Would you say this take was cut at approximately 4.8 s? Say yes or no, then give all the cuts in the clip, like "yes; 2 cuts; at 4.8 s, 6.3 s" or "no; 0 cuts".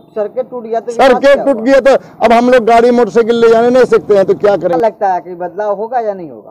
yes; 1 cut; at 4.8 s